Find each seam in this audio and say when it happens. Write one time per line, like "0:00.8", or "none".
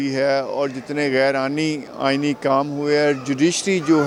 none